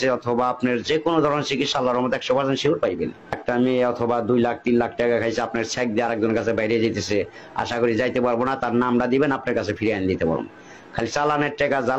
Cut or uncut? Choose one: cut